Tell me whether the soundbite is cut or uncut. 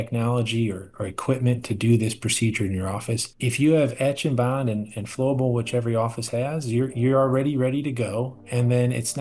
cut